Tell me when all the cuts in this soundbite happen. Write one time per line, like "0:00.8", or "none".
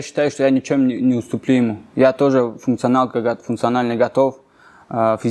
none